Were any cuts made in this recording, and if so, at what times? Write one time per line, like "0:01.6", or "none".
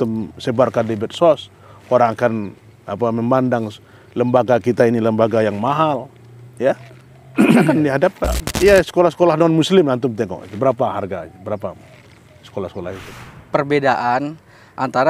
0:08.4
0:13.2